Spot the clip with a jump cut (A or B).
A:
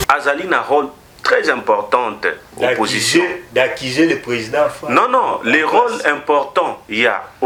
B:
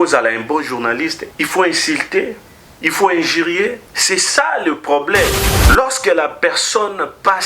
B